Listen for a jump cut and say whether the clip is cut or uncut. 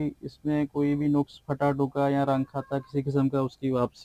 uncut